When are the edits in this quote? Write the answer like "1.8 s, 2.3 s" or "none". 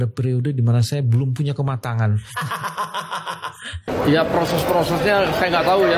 3.9 s

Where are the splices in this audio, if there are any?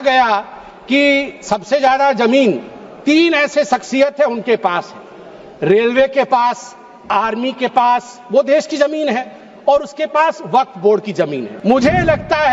11.5 s

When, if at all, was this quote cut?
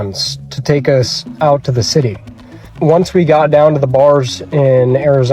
2.6 s

